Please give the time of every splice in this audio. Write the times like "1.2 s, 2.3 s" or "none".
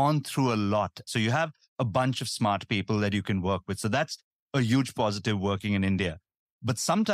1.1 s